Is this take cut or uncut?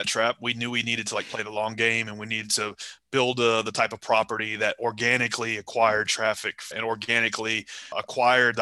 uncut